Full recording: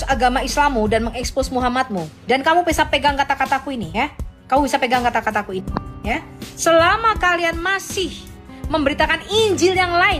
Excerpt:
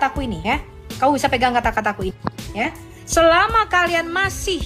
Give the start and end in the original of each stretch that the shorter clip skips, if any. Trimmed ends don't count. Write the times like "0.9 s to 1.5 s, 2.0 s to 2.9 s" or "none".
none